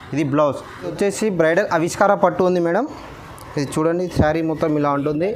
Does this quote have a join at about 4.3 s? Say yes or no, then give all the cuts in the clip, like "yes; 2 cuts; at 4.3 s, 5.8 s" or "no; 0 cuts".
no; 1 cut; at 0.9 s